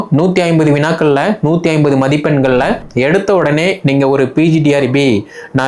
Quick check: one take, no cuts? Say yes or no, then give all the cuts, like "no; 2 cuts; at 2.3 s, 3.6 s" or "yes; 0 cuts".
no; 1 cut; at 2.9 s